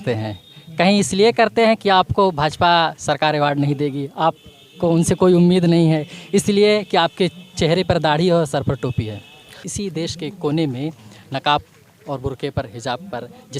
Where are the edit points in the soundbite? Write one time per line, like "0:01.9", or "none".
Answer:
0:09.7